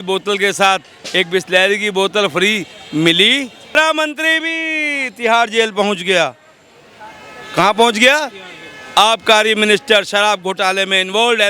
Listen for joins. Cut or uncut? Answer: cut